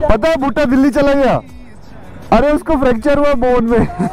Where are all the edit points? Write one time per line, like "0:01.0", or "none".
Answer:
none